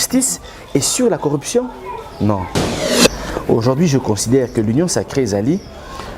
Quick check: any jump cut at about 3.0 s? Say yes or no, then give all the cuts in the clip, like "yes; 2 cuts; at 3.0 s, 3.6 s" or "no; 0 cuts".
yes; 1 cut; at 3.0 s